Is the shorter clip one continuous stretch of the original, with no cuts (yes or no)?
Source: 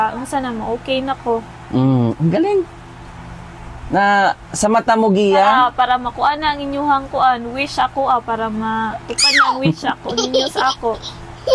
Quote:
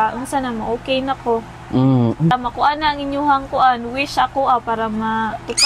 no